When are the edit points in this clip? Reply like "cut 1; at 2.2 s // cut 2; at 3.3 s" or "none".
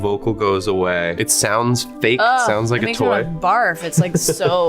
cut 1; at 1.1 s